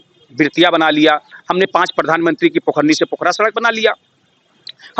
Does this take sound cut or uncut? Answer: uncut